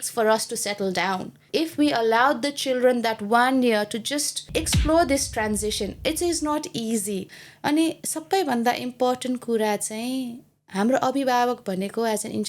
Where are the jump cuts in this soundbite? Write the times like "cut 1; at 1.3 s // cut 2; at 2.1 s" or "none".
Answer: cut 1; at 1.4 s // cut 2; at 4.5 s // cut 3; at 7.3 s